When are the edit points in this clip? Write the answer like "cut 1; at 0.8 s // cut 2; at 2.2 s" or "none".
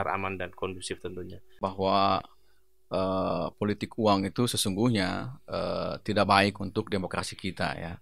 cut 1; at 1.6 s